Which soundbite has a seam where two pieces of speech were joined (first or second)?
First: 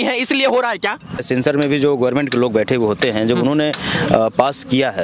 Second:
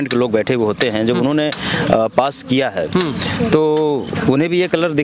first